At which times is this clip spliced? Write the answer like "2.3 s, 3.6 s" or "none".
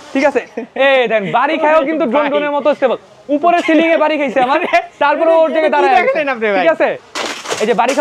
7.1 s